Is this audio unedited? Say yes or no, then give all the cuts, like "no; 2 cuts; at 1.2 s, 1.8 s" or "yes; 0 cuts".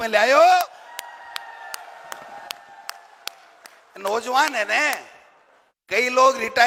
yes; 0 cuts